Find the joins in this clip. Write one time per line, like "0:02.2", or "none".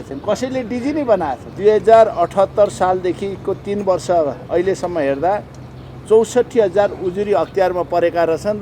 0:01.5